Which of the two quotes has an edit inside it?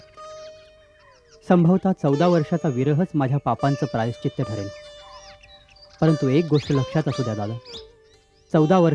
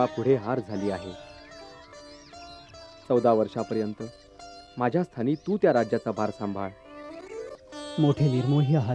second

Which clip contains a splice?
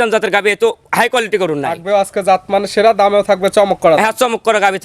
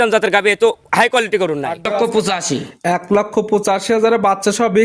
second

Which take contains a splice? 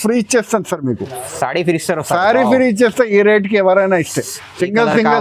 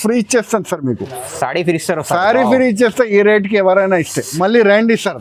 second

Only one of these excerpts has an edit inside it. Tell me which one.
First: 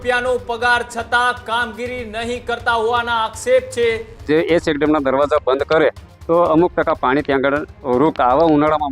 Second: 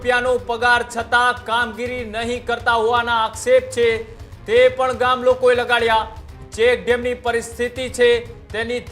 first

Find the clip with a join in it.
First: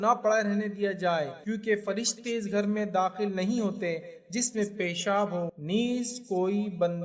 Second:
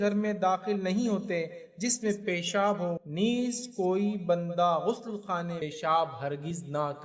second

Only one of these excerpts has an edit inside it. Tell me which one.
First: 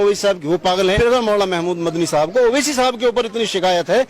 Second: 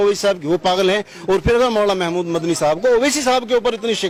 first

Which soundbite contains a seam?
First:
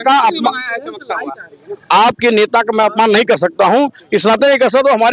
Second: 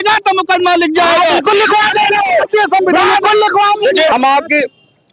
second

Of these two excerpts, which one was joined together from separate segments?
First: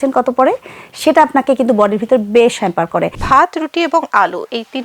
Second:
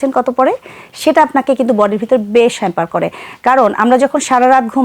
first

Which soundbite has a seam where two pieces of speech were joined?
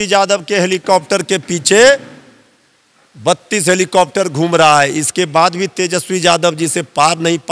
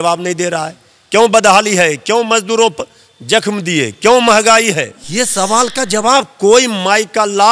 second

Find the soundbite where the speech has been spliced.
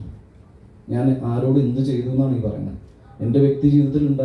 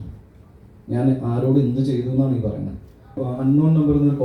second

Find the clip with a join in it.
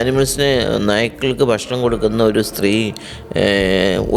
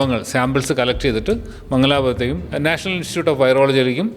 second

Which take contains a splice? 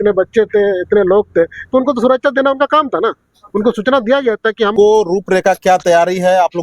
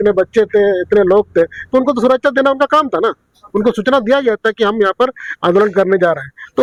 first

